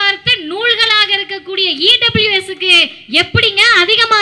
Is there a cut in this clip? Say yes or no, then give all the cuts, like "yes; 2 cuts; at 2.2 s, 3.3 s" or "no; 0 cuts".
no; 0 cuts